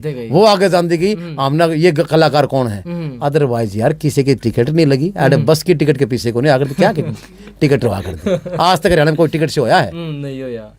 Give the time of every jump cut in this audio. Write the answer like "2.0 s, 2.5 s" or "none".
none